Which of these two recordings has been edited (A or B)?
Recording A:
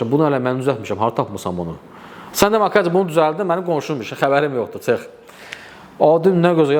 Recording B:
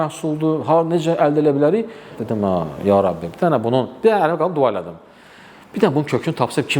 B